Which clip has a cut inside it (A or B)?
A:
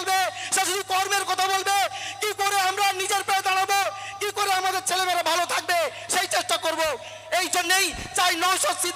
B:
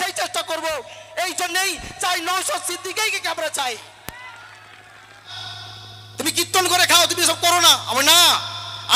B